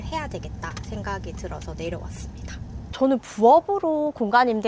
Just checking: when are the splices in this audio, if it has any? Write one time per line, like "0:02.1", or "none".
0:03.0